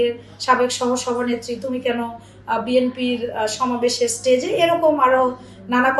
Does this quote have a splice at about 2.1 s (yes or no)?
no